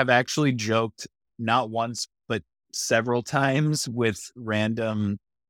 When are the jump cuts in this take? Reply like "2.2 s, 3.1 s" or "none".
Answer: none